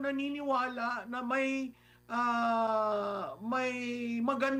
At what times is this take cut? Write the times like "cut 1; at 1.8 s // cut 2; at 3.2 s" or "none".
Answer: none